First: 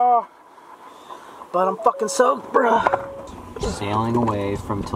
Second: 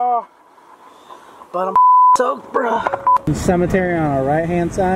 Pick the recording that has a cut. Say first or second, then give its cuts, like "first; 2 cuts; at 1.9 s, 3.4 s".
second; 1 cut; at 3.2 s